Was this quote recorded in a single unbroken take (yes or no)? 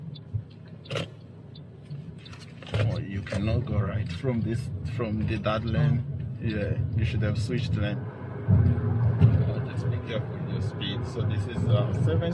no